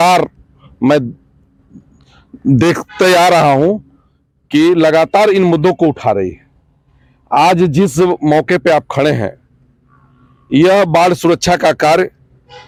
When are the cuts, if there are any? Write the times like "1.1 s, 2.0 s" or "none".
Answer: none